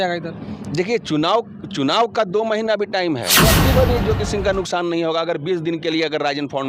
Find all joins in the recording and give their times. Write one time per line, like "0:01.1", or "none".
0:03.4